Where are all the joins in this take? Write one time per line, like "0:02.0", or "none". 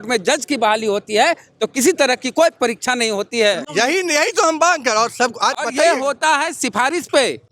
none